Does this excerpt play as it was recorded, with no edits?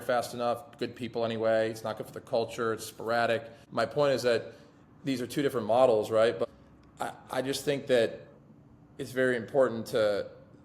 no; 2 cuts; at 3.6 s, 6.4 s

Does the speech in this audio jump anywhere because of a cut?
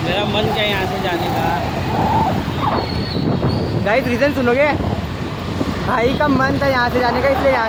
no; 0 cuts

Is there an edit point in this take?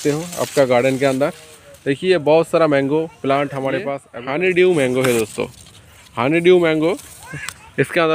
yes; 1 cut; at 4.4 s

